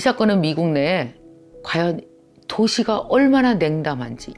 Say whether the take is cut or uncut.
uncut